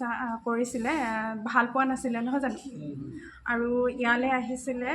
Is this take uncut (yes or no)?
yes